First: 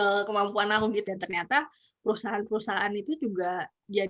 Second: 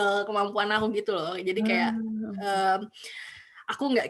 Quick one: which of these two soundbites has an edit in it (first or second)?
first